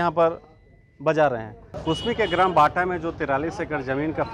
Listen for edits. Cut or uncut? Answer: uncut